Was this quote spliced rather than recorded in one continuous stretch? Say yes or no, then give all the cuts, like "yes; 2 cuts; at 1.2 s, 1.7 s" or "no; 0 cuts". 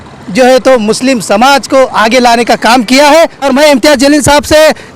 yes; 1 cut; at 3.5 s